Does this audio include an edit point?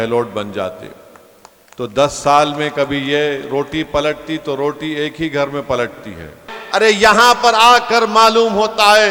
yes; 1 cut; at 6.5 s

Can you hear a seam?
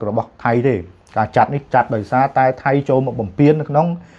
no; 0 cuts

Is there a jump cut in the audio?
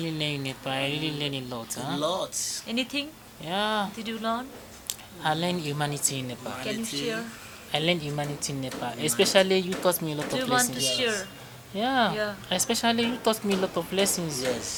no; 0 cuts

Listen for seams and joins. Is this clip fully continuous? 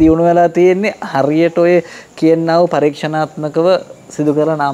yes; 0 cuts

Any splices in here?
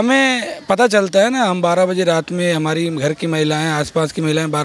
no; 0 cuts

